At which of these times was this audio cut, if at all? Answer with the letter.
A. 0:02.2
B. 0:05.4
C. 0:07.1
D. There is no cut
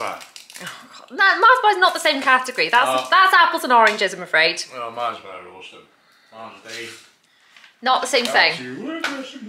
D